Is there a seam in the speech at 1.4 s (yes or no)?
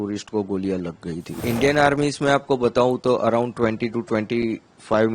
yes